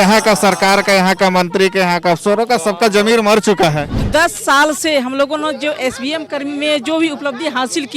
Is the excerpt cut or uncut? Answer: cut